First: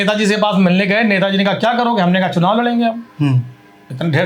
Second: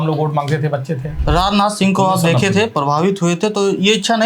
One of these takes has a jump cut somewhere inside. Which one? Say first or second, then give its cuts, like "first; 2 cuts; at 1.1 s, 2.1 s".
second; 1 cut; at 1.1 s